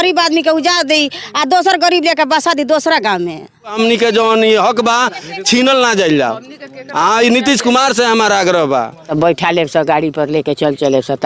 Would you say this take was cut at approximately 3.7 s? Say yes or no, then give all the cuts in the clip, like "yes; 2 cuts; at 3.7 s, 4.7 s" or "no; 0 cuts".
yes; 2 cuts; at 3.7 s, 9.1 s